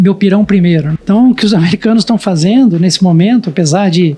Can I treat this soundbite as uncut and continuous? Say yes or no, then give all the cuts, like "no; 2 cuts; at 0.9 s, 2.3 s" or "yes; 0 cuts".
no; 1 cut; at 0.9 s